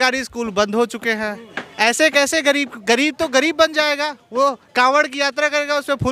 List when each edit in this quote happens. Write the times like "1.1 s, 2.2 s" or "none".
none